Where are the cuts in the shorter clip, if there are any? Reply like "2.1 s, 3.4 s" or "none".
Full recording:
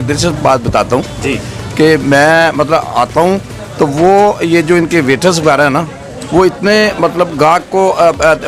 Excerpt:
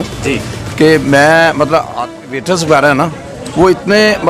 2.1 s